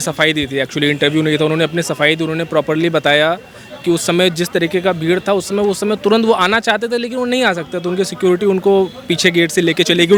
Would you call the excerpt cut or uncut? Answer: uncut